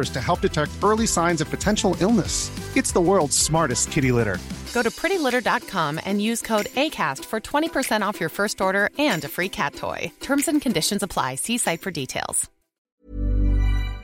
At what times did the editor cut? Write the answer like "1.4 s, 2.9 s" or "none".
12.8 s